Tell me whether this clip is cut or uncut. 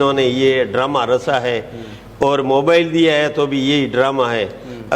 uncut